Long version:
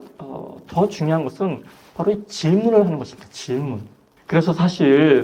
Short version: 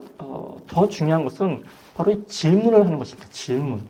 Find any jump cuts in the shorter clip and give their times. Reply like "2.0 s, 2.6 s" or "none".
none